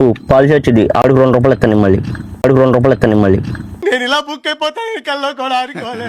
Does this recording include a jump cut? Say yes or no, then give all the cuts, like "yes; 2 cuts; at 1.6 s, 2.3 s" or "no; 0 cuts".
no; 0 cuts